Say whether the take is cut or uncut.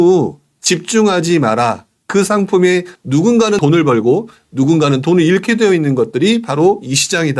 cut